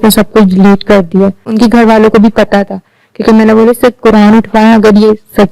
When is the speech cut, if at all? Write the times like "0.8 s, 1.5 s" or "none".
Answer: 1.5 s